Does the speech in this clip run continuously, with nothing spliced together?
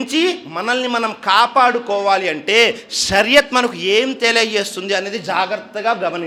yes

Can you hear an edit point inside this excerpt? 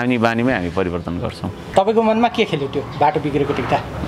yes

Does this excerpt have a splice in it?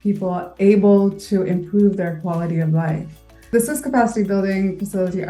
yes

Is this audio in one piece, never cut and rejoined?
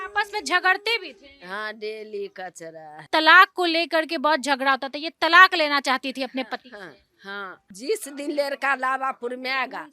no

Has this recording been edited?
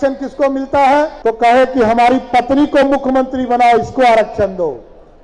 yes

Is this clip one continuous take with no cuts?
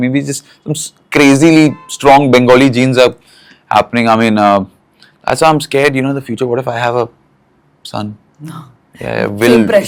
yes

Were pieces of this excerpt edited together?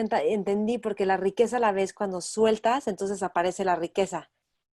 no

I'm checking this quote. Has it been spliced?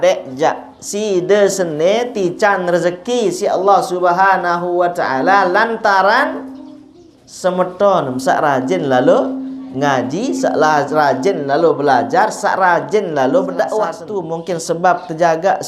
yes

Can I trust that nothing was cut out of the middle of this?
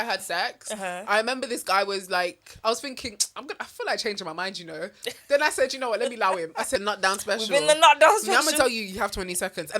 no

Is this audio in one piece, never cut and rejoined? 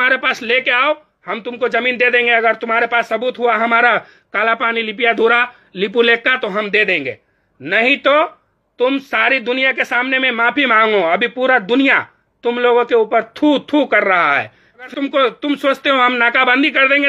no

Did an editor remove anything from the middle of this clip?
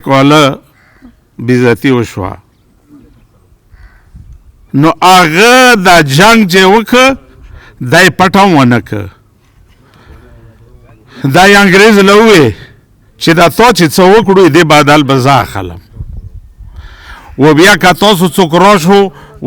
no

